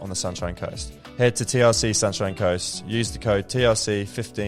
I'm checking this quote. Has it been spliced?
yes; 1 cut; at 1.0 s

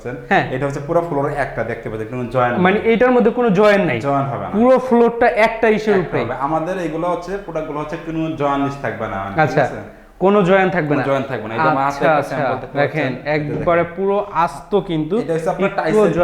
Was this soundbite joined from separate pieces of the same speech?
no; 0 cuts

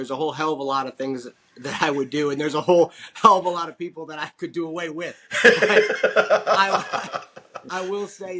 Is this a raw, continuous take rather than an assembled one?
yes; 0 cuts

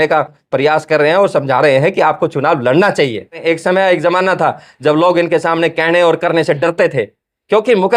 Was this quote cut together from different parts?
yes; 1 cut; at 3.4 s

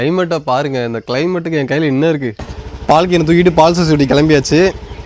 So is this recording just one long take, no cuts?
no; 1 cut; at 2.5 s

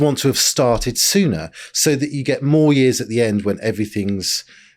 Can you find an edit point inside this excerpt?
no; 0 cuts

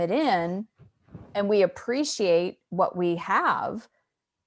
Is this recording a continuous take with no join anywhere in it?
yes; 0 cuts

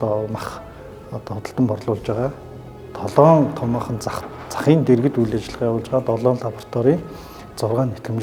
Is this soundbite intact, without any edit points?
yes; 0 cuts

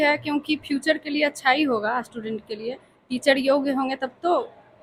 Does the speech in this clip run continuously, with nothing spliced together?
yes; 0 cuts

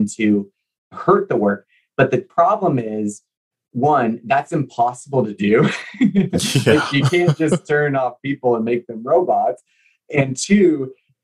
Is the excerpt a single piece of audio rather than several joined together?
no; 2 cuts; at 0.9 s, 2.3 s

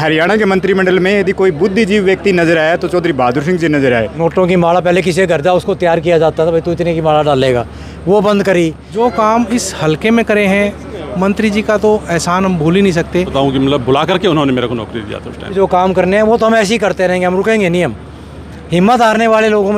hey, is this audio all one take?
no; 4 cuts; at 4.1 s, 8.8 s, 13.3 s, 15.5 s

